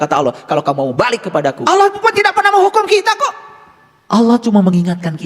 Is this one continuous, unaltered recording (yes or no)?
no